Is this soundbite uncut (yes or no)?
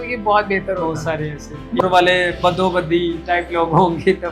no